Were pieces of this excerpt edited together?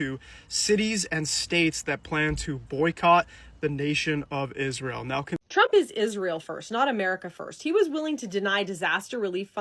yes; 1 cut; at 5.4 s

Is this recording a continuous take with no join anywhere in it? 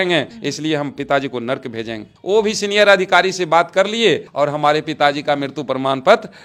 yes; 0 cuts

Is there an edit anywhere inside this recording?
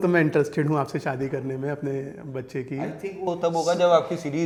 no; 0 cuts

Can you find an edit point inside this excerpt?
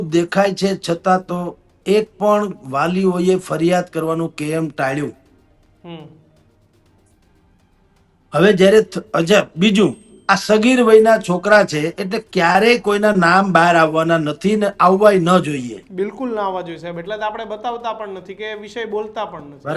no; 0 cuts

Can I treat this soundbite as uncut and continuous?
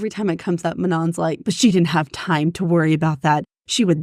no; 1 cut; at 1.4 s

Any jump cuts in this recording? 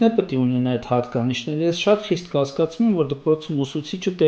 no; 0 cuts

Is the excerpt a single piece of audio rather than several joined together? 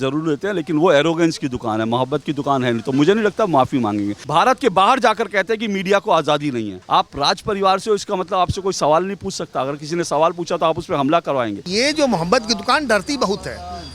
no; 3 cuts; at 4.2 s, 6.7 s, 11.6 s

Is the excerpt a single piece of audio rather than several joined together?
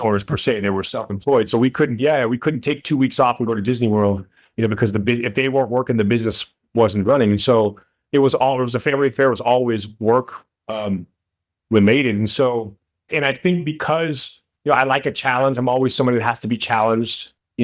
yes; 0 cuts

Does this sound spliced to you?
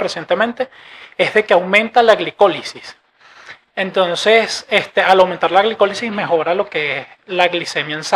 no; 0 cuts

